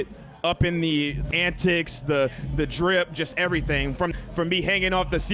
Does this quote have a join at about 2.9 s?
no; 2 cuts; at 1.3 s, 4.1 s

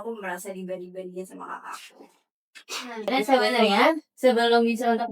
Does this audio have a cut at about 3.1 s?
yes; 1 cut; at 3.1 s

